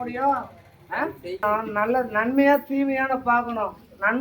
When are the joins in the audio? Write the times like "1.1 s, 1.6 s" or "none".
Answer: 1.4 s